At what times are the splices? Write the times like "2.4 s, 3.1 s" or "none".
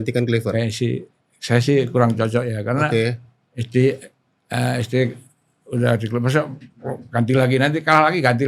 none